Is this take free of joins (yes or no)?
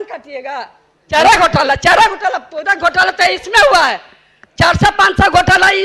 no